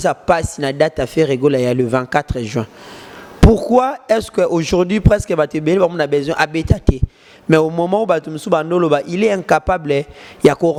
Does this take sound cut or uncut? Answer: uncut